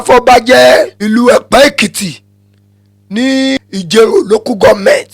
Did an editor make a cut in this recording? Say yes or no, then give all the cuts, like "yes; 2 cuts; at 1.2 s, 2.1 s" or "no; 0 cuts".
yes; 2 cuts; at 1.0 s, 3.6 s